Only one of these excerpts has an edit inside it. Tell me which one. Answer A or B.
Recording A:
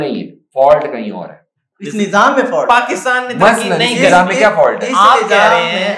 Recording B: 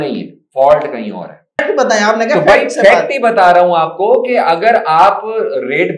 B